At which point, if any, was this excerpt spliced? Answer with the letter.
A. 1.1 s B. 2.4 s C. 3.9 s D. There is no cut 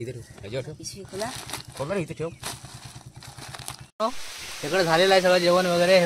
C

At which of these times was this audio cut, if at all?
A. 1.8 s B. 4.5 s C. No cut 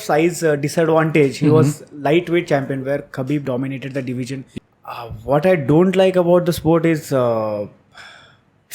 B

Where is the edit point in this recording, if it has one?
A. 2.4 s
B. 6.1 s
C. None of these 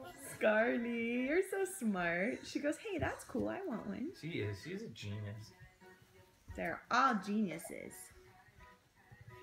A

